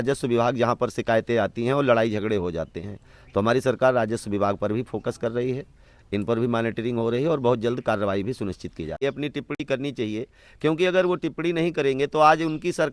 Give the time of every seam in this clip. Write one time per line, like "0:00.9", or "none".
0:09.0

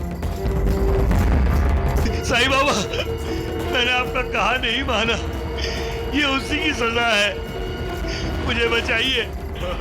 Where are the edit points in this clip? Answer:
0:02.1

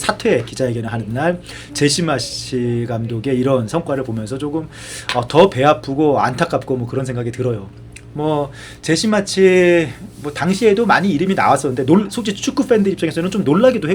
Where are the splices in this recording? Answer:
none

